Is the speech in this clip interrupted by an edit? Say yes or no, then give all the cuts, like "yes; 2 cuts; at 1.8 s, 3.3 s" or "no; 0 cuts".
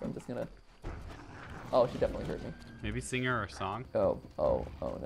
yes; 1 cut; at 3.9 s